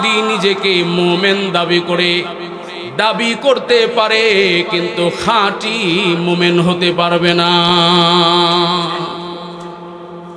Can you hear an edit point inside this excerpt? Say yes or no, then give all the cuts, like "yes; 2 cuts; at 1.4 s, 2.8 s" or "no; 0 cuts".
no; 0 cuts